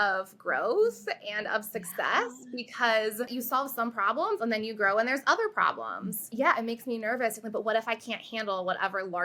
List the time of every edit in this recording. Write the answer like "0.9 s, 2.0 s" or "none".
none